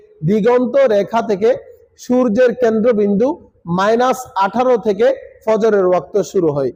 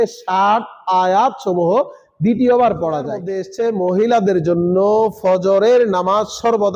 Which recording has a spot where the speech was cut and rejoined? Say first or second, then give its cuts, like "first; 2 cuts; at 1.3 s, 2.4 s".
second; 1 cut; at 3.4 s